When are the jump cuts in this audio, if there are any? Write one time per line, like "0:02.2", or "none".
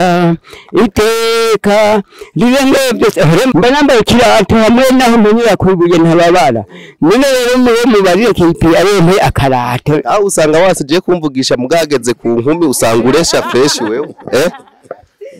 0:03.5
0:10.0